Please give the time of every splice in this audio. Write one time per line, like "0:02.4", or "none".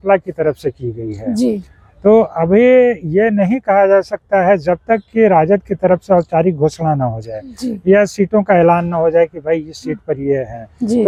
none